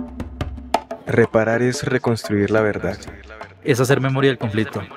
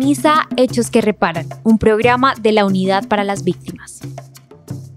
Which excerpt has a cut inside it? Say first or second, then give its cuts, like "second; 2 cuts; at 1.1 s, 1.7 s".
second; 1 cut; at 3.9 s